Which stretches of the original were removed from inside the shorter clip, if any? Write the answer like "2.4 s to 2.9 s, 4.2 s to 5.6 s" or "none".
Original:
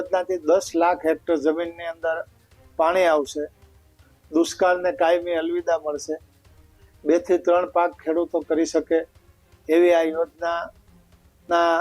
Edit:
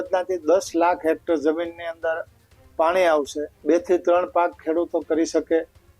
3.5 s to 6.9 s